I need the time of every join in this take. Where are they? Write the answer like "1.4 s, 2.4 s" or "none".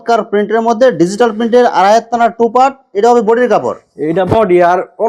none